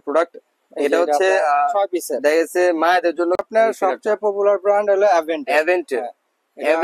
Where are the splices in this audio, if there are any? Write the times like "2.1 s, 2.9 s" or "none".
3.4 s